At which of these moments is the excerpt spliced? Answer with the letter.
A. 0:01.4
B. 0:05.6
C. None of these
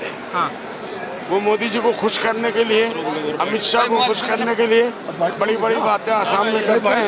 C